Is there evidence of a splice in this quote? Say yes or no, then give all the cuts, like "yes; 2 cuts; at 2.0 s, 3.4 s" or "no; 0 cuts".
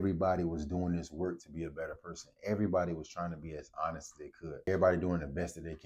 yes; 1 cut; at 4.5 s